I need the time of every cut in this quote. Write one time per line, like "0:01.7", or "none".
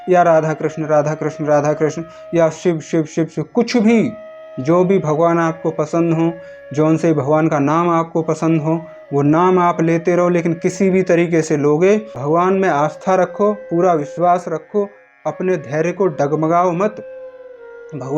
0:12.1